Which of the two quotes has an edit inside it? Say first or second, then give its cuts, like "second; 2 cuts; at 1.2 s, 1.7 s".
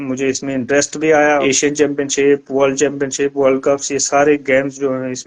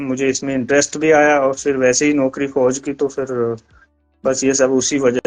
first; 1 cut; at 1.4 s